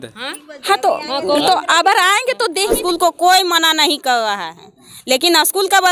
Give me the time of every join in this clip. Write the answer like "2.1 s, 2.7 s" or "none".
2.8 s